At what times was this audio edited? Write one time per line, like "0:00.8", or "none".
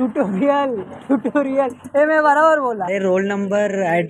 0:02.9